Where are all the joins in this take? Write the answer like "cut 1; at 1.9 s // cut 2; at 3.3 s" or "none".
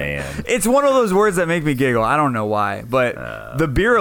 none